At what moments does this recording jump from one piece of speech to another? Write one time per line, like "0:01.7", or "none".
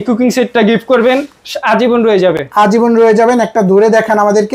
none